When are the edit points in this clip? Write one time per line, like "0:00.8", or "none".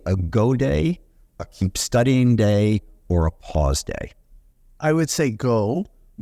none